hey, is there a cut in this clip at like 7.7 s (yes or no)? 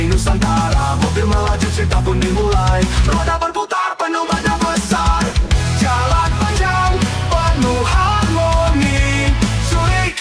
no